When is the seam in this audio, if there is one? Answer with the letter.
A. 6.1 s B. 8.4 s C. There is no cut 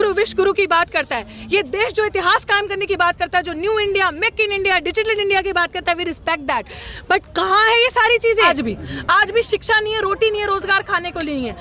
B